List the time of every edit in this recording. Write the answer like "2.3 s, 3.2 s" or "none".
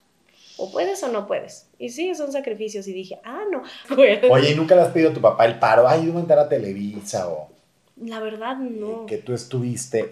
3.8 s, 9.1 s